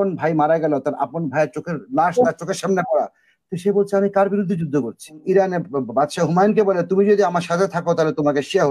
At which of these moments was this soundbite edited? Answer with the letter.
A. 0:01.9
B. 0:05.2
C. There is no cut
B